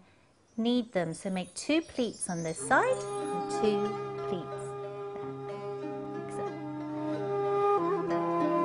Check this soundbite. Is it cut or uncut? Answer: uncut